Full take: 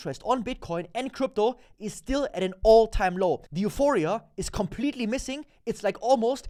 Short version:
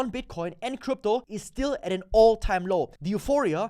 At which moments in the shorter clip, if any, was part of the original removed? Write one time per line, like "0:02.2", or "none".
0:01.4